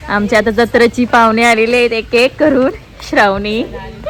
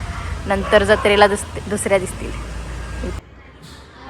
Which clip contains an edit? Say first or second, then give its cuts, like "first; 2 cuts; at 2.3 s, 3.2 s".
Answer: second; 1 cut; at 3.2 s